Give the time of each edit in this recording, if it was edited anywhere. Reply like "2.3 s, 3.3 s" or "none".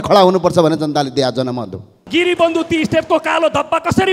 2.0 s

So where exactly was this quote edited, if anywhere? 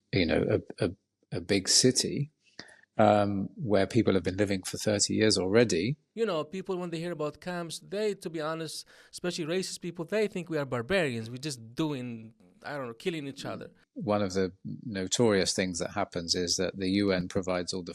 6.1 s, 13.9 s

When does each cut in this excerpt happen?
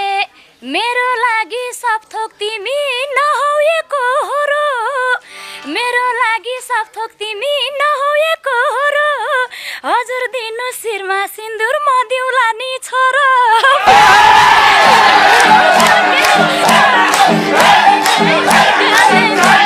none

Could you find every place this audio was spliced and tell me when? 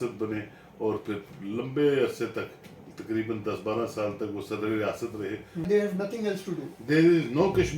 5.7 s

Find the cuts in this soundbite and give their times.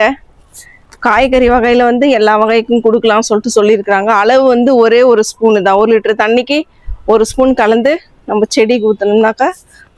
none

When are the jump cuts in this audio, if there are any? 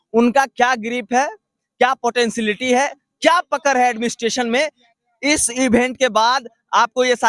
none

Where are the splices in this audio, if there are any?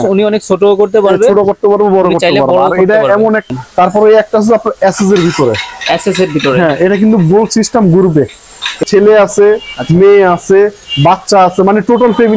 3.5 s, 8.8 s

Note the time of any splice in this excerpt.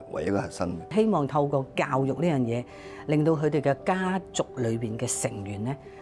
0.9 s

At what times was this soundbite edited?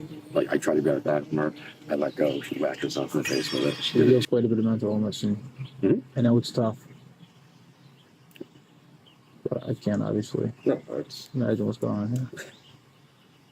4.1 s

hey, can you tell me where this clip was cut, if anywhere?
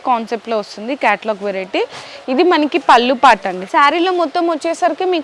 3.6 s

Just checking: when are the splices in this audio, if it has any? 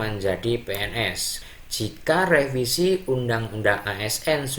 1.4 s

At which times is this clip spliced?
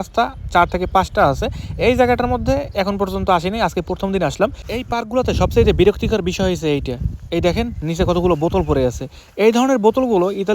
4.6 s

